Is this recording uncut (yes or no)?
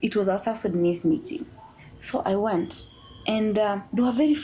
yes